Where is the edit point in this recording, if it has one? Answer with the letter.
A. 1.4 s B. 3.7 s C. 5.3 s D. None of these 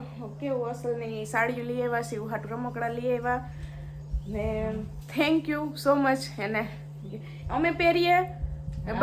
D